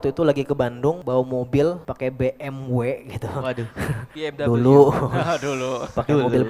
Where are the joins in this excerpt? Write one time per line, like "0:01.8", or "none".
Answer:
0:01.0
0:01.9
0:04.1